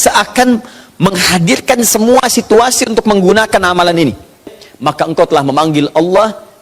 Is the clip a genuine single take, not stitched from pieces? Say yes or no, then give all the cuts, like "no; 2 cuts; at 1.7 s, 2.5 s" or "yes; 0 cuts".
no; 1 cut; at 4.6 s